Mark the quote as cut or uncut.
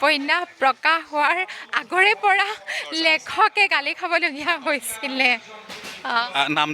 uncut